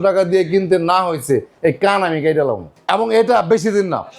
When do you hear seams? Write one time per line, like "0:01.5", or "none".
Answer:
0:02.7